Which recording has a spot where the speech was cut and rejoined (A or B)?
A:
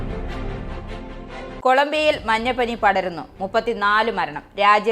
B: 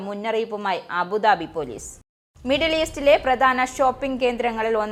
A